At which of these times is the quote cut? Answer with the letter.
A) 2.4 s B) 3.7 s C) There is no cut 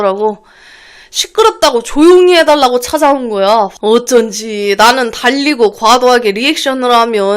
B